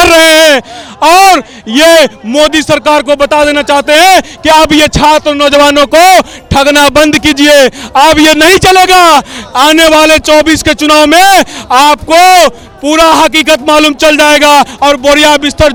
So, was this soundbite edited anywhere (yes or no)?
no